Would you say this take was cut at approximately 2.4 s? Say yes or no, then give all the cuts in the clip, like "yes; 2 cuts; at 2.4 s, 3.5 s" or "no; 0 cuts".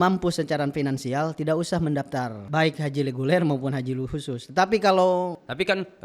yes; 1 cut; at 2.4 s